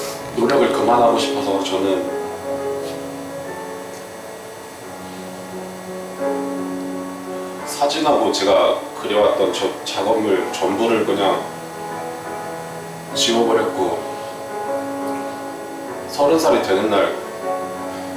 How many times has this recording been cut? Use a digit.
0